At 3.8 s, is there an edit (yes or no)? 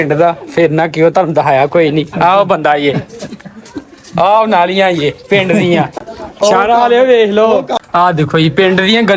no